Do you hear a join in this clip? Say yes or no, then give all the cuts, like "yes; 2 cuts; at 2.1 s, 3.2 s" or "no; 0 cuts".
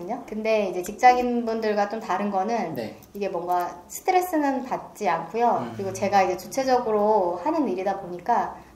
no; 0 cuts